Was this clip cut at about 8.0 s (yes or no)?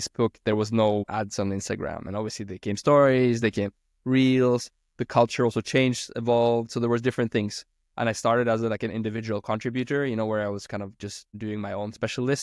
no